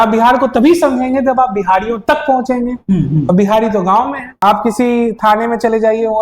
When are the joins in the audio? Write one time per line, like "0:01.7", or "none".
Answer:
0:04.4